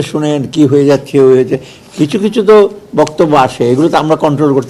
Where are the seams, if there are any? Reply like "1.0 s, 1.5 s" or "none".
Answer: none